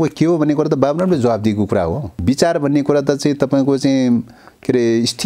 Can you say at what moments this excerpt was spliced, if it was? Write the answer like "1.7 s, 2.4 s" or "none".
2.1 s